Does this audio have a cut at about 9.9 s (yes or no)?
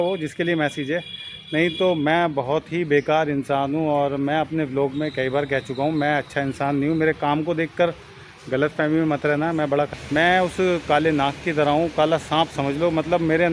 yes